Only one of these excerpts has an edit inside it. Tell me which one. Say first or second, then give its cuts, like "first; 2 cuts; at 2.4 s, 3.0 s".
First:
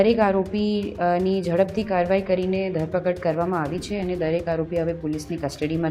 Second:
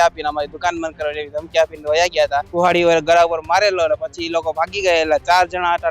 second; 1 cut; at 2.5 s